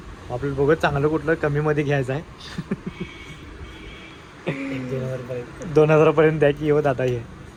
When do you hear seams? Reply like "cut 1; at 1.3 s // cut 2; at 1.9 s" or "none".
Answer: none